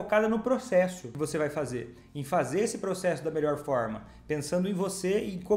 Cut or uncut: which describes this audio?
cut